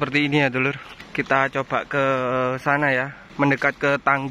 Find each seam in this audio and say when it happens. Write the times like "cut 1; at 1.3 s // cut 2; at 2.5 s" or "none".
cut 1; at 0.9 s // cut 2; at 3.2 s